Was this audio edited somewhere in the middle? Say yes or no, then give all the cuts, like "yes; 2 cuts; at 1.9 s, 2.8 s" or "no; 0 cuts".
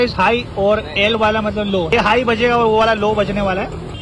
no; 0 cuts